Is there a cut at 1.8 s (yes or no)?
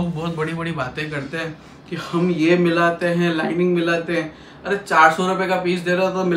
no